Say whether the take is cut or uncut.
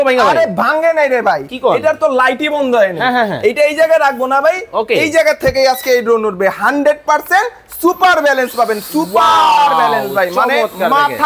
uncut